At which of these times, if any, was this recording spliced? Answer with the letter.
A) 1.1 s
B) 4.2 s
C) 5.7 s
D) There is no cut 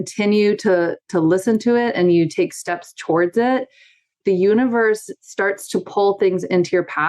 B